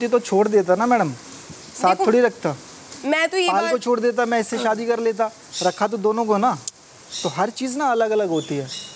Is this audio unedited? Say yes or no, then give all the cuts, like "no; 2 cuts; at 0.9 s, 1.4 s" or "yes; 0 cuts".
yes; 0 cuts